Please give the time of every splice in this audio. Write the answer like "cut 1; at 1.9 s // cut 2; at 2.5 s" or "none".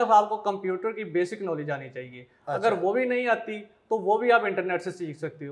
none